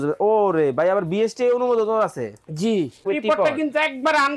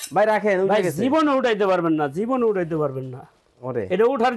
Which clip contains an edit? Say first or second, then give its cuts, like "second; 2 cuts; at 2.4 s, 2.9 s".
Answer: first; 1 cut; at 3.0 s